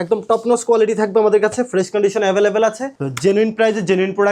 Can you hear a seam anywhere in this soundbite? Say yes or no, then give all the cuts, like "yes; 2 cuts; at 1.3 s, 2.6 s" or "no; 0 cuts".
yes; 1 cut; at 2.9 s